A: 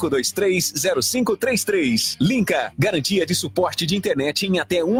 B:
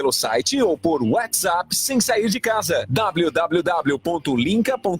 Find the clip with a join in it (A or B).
B